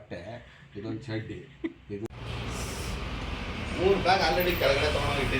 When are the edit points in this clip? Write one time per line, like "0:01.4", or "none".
0:02.1